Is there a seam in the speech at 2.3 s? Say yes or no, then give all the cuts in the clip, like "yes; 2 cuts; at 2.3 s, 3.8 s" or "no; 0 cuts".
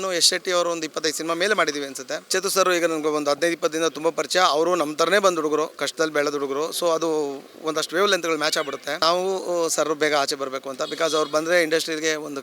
yes; 2 cuts; at 2.3 s, 9.0 s